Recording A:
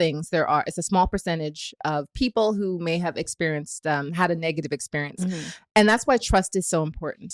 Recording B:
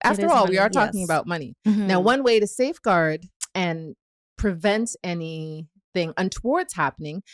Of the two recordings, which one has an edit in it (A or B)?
B